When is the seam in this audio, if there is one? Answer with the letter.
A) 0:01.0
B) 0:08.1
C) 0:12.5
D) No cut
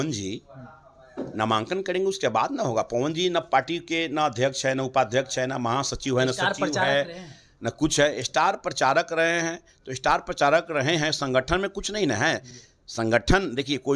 D